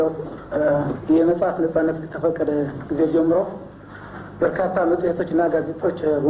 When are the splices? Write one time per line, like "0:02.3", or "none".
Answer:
none